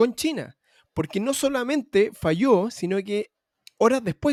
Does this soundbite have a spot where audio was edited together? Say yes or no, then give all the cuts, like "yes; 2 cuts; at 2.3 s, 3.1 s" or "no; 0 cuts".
no; 0 cuts